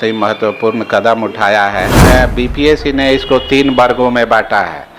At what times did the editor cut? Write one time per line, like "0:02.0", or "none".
0:01.9